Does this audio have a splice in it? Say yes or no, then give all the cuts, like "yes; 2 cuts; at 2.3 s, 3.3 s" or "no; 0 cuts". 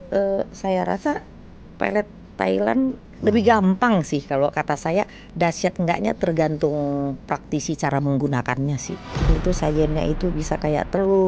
yes; 2 cuts; at 3.1 s, 9.3 s